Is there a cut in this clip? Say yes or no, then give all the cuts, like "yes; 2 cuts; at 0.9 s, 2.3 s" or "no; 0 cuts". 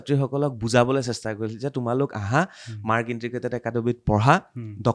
no; 0 cuts